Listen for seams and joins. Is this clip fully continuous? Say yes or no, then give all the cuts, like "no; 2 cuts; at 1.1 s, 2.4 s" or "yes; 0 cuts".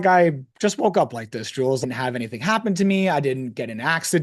no; 1 cut; at 1.8 s